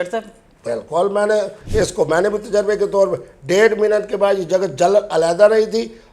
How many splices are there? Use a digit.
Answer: 1